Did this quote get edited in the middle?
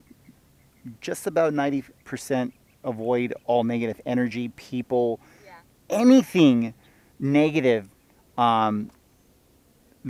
no; 0 cuts

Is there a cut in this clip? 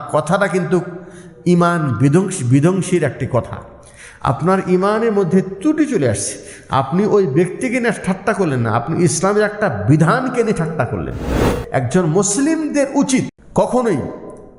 yes; 2 cuts; at 11.5 s, 13.4 s

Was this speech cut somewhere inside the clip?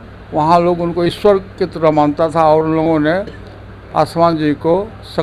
no; 0 cuts

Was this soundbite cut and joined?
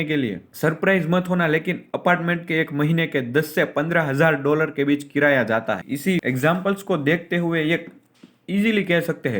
no; 0 cuts

